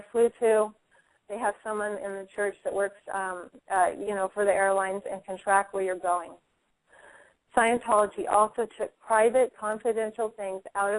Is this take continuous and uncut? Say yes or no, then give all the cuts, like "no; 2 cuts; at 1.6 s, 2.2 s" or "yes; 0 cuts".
yes; 0 cuts